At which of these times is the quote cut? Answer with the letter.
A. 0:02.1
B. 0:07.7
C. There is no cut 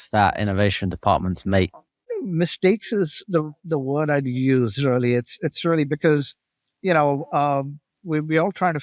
A